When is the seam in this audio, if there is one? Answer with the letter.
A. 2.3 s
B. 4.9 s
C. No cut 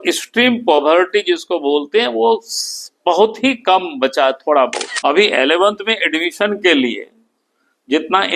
B